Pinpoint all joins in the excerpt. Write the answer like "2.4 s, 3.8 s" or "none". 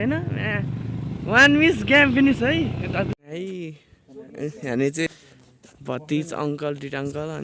3.2 s, 5.1 s